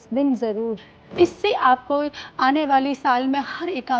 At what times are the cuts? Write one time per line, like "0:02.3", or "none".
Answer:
0:01.0